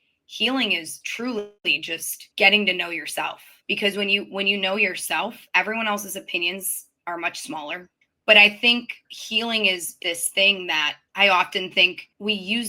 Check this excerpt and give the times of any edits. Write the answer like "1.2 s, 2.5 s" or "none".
8.0 s